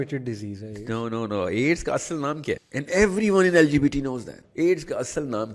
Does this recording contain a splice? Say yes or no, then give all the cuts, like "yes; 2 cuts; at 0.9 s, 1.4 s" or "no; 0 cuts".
yes; 2 cuts; at 2.7 s, 4.4 s